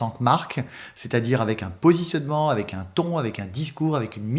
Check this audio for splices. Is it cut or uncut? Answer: uncut